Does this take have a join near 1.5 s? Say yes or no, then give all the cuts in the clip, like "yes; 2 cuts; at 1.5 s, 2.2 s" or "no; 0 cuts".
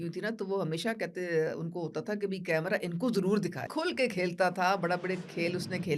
no; 1 cut; at 3.7 s